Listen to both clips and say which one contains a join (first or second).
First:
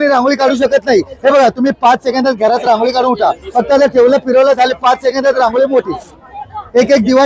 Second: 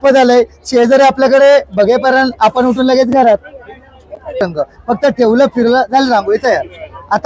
second